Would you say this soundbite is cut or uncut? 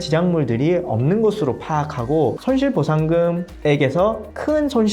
uncut